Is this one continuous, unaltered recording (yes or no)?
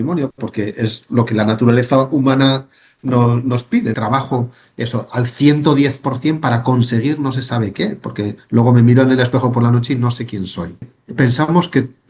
no